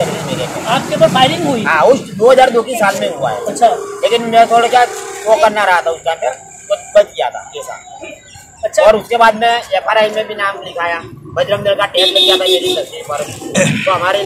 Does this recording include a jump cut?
no; 0 cuts

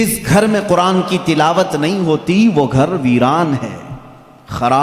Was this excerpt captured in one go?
yes; 0 cuts

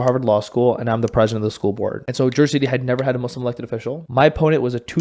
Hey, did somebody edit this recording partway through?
yes; 2 cuts; at 2.0 s, 4.0 s

